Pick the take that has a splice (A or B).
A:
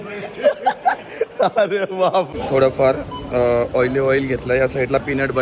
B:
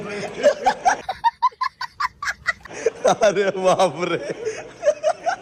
A